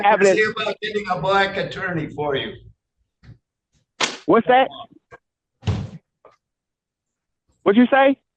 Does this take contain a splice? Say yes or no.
no